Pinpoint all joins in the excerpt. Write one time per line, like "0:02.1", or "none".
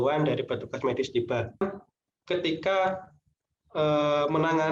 0:01.6